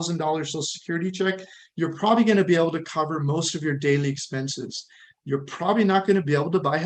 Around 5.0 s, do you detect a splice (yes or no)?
no